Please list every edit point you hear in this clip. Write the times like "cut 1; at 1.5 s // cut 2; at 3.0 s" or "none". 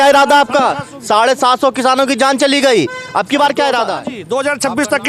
cut 1; at 4.1 s